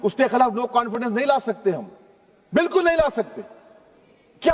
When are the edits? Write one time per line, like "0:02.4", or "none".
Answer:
none